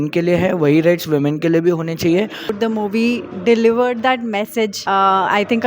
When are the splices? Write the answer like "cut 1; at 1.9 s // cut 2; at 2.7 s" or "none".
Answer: cut 1; at 2.6 s // cut 2; at 4.8 s